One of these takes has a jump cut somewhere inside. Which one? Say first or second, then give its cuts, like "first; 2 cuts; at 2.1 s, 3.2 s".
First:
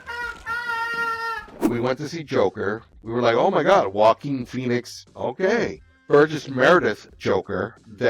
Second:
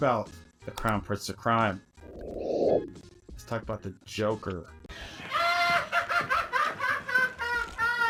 first; 2 cuts; at 1.7 s, 5.9 s